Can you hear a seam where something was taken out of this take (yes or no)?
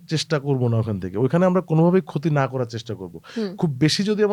no